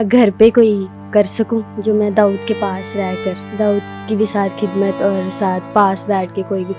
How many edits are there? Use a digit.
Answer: 2